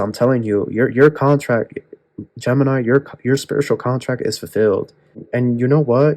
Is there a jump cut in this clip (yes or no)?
yes